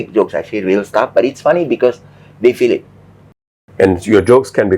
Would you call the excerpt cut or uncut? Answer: cut